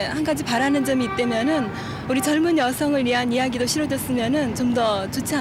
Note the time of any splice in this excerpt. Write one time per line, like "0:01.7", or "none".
none